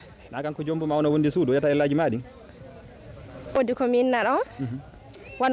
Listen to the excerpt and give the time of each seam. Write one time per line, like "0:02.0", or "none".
0:03.6